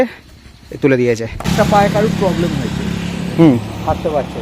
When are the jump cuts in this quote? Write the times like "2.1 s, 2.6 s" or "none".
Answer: 1.5 s